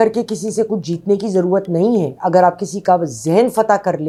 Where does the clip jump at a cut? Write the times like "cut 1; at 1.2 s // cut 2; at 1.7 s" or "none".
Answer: none